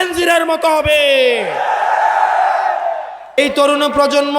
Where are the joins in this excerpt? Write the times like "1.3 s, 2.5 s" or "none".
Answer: 3.4 s